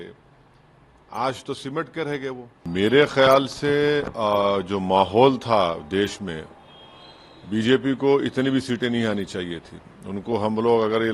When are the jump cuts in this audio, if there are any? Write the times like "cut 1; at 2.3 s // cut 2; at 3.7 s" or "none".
cut 1; at 2.6 s